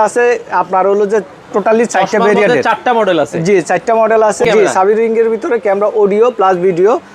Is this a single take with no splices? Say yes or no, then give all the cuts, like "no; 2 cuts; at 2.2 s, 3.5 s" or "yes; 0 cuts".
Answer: no; 1 cut; at 4.4 s